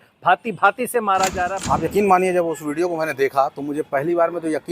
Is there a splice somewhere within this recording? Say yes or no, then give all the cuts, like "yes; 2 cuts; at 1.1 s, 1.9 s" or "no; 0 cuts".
yes; 1 cut; at 1.6 s